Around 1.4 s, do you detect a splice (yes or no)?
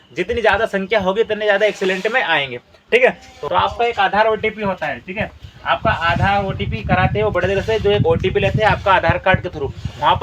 no